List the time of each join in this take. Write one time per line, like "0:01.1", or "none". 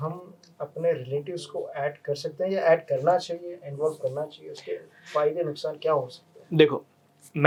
none